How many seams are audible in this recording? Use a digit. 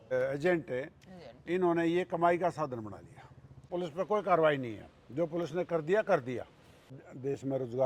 2